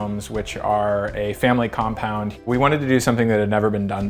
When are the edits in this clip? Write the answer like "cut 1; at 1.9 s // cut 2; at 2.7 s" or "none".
cut 1; at 2.4 s